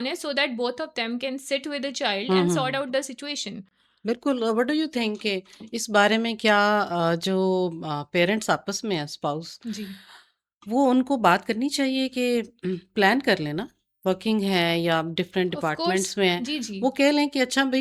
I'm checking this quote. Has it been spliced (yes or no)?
no